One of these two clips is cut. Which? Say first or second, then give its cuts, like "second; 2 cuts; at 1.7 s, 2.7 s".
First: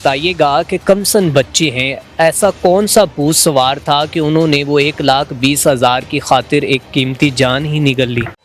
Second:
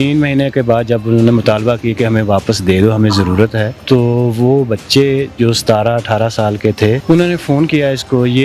second; 2 cuts; at 3.7 s, 7.0 s